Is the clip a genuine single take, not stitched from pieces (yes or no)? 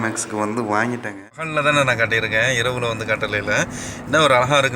no